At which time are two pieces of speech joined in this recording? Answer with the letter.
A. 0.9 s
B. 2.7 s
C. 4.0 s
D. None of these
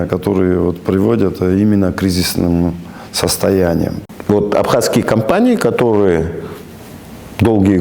C